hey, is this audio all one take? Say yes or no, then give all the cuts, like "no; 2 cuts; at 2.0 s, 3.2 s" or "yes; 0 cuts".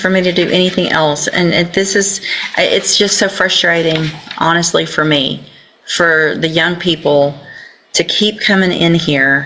yes; 0 cuts